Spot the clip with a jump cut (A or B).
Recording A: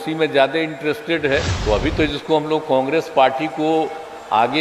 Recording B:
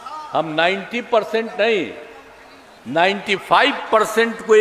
A